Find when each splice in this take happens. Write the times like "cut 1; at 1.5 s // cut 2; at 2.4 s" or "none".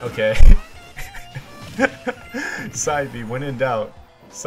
cut 1; at 2.7 s